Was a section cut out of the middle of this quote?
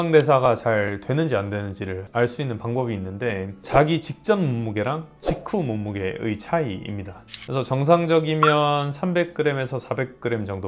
yes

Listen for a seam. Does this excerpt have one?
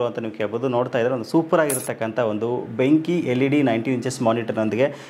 no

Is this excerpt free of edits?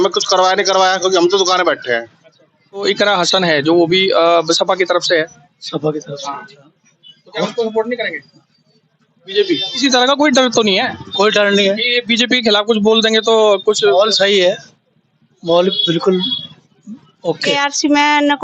no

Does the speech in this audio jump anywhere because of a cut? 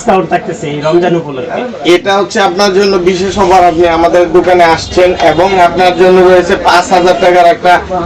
no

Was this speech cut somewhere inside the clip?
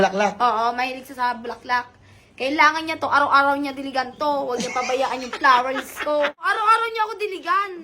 yes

